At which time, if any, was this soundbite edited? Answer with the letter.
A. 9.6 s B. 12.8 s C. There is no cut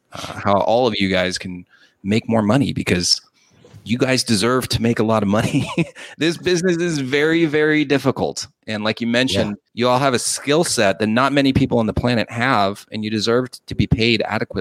A